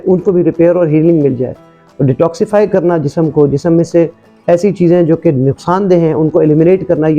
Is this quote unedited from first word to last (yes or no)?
no